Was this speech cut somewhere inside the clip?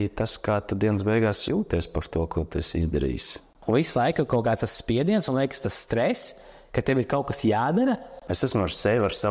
yes; 2 cuts; at 3.5 s, 8.2 s

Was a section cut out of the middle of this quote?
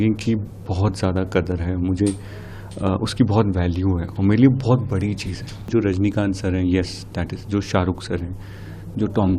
yes; 1 cut; at 5.7 s

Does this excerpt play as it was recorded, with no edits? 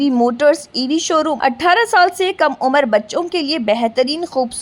no; 1 cut; at 1.3 s

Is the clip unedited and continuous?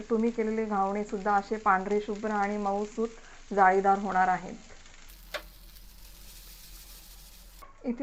yes; 0 cuts

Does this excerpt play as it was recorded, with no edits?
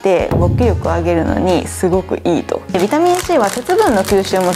no; 1 cut; at 2.8 s

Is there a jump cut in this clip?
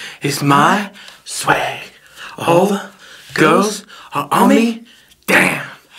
no; 0 cuts

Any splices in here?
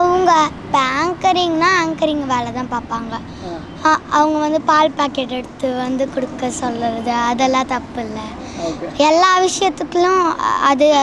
no; 0 cuts

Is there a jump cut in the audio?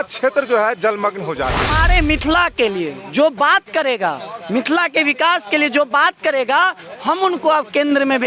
yes; 1 cut; at 1.8 s

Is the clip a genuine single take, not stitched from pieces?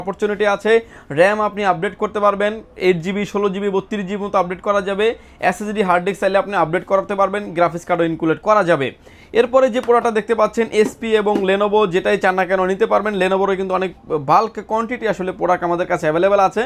yes; 0 cuts

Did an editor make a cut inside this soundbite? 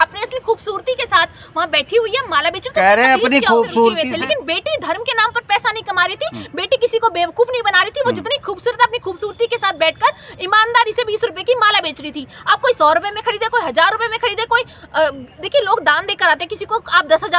yes; 1 cut; at 4.1 s

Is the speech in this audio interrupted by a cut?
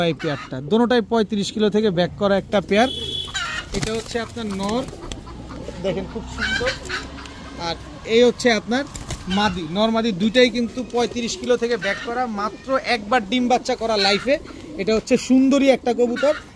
no; 0 cuts

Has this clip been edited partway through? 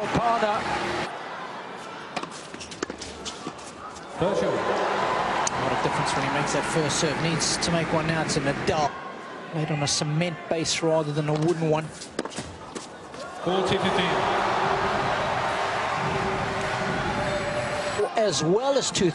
yes; 1 cut; at 15.8 s

